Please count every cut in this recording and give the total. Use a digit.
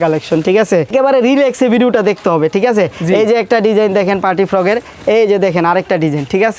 0